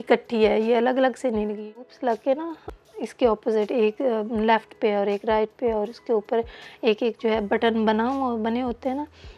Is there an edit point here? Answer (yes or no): yes